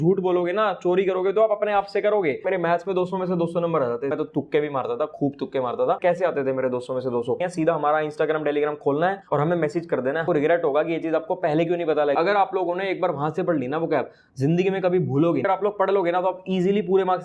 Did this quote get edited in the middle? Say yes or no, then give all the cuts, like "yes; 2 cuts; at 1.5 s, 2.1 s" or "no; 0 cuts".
yes; 7 cuts; at 2.4 s, 4.1 s, 6.0 s, 7.4 s, 10.2 s, 12.2 s, 15.4 s